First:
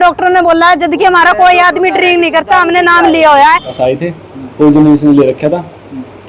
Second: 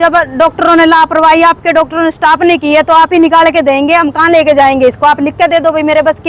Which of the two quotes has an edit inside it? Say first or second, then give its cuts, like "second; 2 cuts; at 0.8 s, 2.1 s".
first; 1 cut; at 3.7 s